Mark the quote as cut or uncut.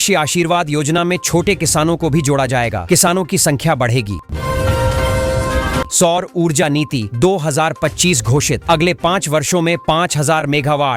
cut